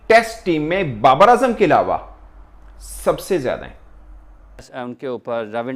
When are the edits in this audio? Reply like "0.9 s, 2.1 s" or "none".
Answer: 4.7 s